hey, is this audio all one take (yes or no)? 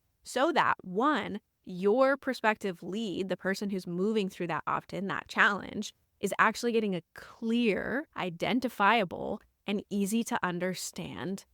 yes